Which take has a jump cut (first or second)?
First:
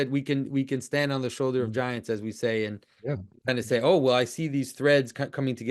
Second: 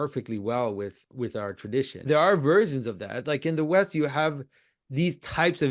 second